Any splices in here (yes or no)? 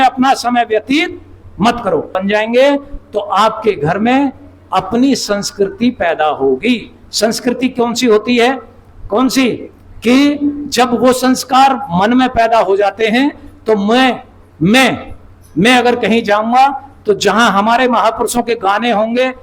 yes